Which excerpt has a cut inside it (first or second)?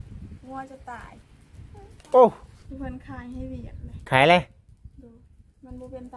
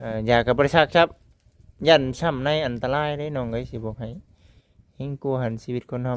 first